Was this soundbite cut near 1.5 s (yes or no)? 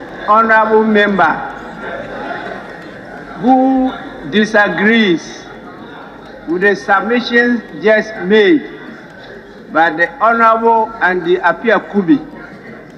no